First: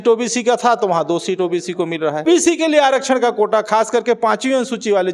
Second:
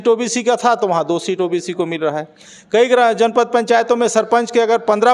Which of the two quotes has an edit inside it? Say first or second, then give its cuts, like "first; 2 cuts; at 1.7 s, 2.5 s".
first; 1 cut; at 2.2 s